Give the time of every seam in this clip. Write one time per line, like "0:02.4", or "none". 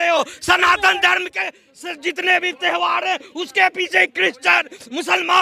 none